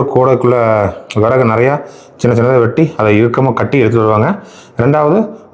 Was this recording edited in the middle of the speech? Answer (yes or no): no